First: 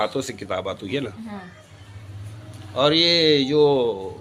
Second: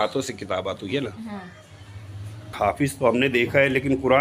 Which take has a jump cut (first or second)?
second